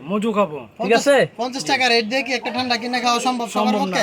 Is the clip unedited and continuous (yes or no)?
yes